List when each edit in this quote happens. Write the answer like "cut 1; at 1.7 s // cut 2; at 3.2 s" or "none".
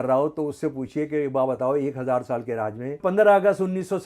cut 1; at 3.0 s